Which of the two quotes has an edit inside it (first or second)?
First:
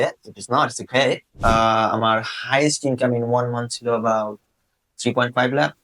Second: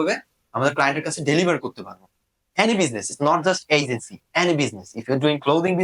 first